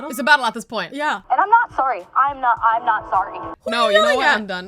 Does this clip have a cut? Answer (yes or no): yes